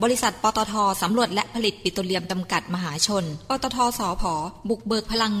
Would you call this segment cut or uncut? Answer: uncut